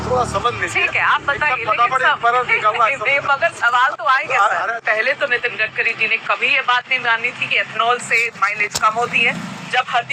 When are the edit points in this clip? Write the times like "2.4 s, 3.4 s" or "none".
4.8 s